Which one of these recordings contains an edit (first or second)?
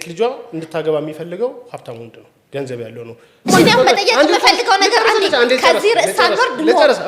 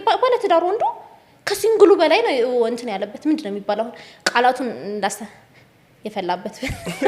first